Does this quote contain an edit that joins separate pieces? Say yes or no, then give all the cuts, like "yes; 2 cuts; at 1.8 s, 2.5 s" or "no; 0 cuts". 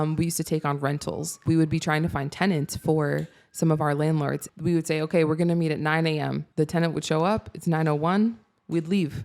yes; 3 cuts; at 1.4 s, 4.5 s, 6.4 s